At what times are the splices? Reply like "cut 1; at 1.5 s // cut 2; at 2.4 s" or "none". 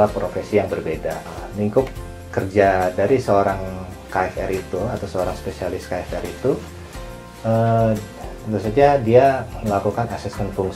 none